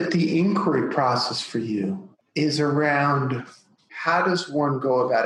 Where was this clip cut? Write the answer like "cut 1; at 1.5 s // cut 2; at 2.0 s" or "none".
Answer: cut 1; at 2.2 s // cut 2; at 3.9 s